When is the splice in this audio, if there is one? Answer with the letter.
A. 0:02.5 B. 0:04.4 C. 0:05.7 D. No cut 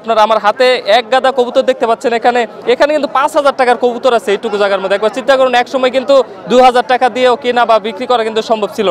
A